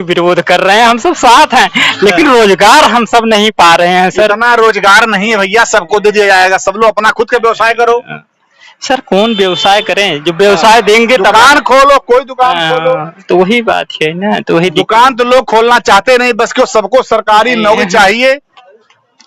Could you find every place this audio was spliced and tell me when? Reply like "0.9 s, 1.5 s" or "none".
none